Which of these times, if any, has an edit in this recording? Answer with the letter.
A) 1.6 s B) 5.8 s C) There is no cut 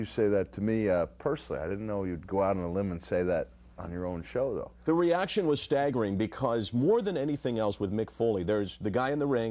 A